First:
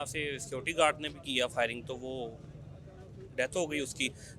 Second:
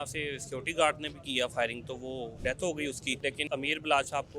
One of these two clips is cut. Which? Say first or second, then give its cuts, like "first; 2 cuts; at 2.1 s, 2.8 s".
second; 2 cuts; at 2.4 s, 3.4 s